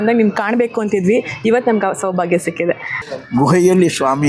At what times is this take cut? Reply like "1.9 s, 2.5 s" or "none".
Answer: 2.9 s